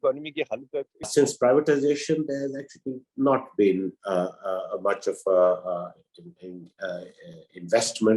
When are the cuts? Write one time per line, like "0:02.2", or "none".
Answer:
0:01.1